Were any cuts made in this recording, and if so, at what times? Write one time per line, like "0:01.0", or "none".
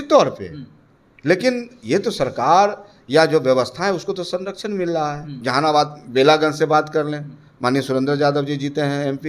0:05.4